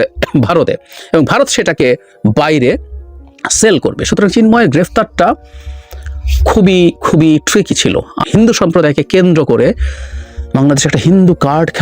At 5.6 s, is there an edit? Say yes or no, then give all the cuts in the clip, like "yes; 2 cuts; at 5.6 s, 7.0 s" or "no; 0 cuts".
no; 1 cut; at 8.1 s